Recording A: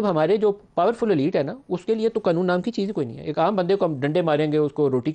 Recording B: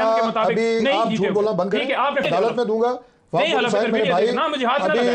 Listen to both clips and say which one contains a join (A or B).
B